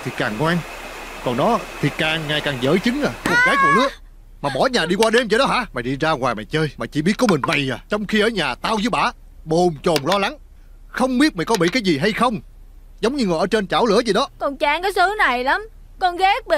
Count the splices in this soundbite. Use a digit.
3